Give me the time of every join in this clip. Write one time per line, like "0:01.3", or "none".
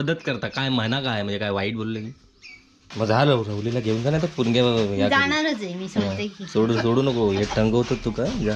0:02.9

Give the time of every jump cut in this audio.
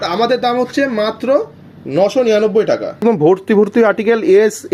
0:03.0

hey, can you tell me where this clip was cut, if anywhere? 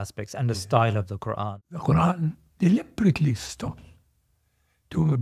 0:01.6

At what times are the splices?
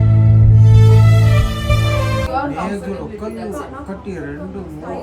0:02.3

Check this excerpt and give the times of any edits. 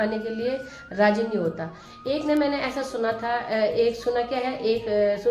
none

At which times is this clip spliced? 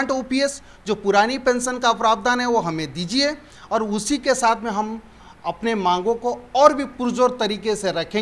none

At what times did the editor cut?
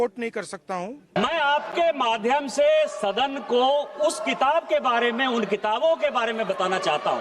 0:01.2

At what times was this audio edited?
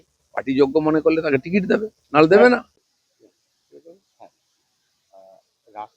0:02.8

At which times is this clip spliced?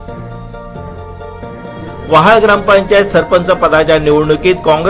none

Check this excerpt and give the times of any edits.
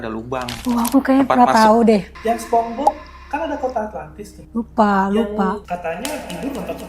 0:02.1
0:05.7

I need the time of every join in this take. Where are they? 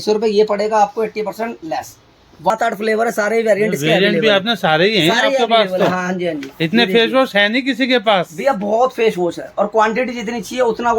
0:02.5

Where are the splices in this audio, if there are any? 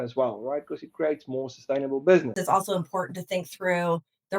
0:02.4

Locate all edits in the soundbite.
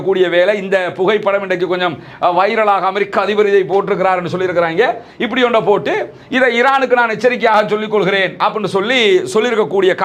none

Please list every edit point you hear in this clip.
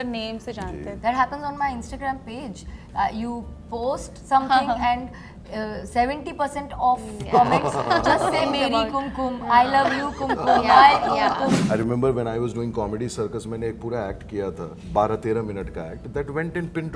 0:00.9
0:11.6
0:14.8

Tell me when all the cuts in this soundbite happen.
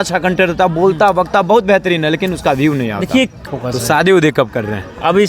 0:03.4

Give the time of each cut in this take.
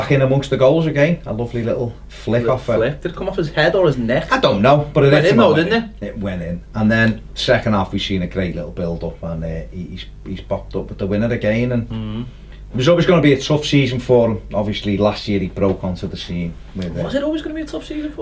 0:14.0

